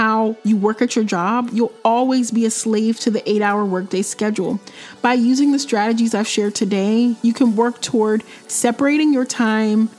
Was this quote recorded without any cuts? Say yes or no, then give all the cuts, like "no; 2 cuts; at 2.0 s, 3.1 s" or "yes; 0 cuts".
yes; 0 cuts